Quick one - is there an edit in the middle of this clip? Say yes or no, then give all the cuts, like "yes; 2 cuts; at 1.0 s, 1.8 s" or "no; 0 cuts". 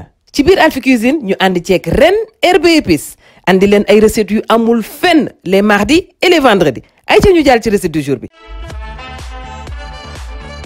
yes; 1 cut; at 8.3 s